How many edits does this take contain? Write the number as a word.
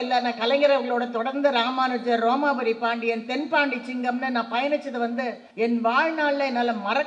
one